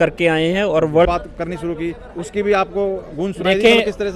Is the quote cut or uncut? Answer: cut